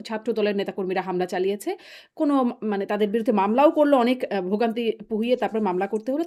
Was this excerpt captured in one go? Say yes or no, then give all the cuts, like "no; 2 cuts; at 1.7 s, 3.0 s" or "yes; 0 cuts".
yes; 0 cuts